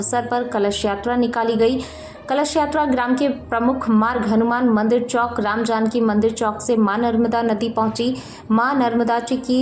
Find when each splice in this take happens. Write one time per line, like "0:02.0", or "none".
none